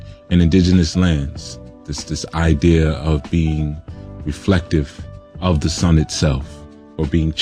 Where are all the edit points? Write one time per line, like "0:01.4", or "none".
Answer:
0:04.1